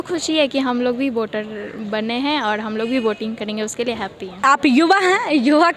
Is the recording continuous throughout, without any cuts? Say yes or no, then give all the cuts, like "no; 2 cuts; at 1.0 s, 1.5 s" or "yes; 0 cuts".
no; 1 cut; at 4.4 s